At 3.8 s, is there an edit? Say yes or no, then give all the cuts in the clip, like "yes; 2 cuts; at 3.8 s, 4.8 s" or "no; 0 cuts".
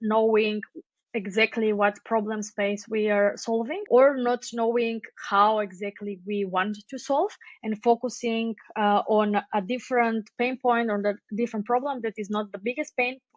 yes; 1 cut; at 3.8 s